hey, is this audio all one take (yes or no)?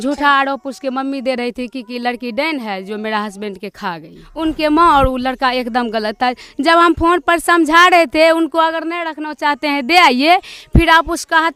yes